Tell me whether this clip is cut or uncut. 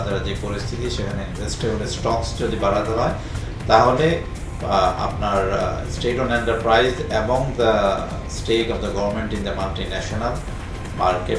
uncut